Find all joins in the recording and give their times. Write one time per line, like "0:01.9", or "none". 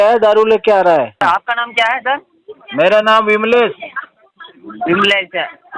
0:01.2